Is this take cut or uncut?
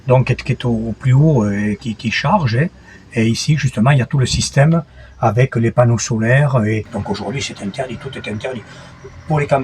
cut